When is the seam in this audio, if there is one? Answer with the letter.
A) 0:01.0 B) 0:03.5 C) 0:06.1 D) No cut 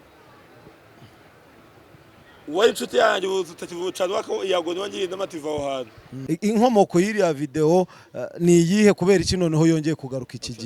C